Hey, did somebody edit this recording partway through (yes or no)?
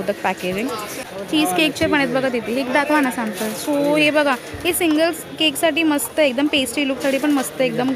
yes